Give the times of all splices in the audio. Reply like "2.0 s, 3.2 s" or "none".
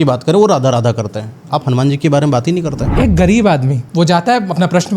2.8 s, 3.8 s